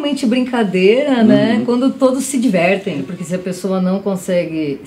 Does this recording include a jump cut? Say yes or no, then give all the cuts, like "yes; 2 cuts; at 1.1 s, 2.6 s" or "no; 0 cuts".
yes; 1 cut; at 3.0 s